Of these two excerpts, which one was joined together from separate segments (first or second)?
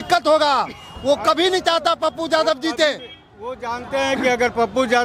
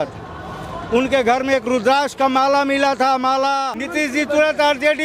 second